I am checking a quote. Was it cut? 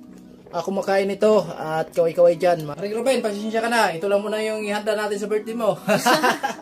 yes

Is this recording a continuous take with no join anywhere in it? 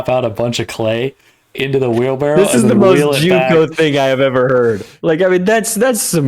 no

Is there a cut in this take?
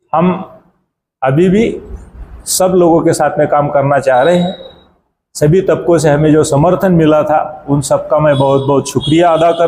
no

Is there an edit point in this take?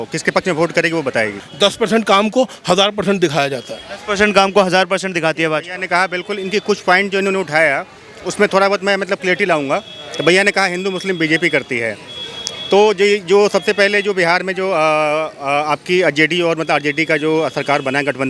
yes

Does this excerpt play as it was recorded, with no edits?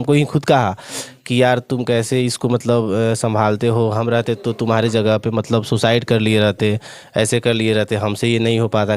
yes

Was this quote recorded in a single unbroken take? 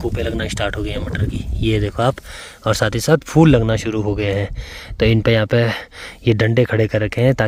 yes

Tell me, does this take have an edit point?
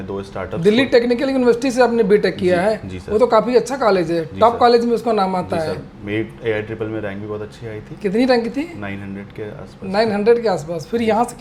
no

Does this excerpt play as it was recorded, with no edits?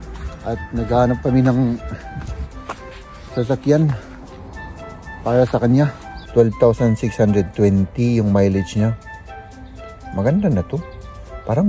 no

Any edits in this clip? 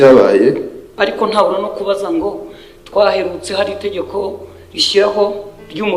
yes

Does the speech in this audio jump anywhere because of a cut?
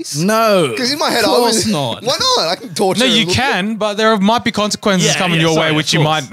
no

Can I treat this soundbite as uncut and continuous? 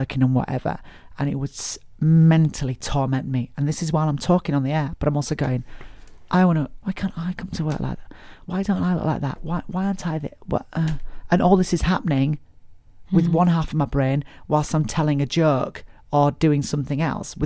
no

